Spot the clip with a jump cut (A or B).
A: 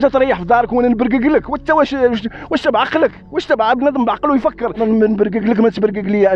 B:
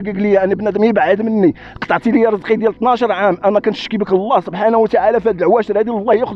A